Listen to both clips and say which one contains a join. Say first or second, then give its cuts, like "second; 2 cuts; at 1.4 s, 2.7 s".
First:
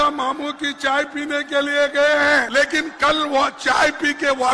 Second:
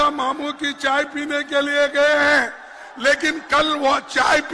first; 1 cut; at 2.5 s